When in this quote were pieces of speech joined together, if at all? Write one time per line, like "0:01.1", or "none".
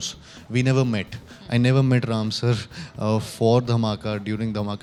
none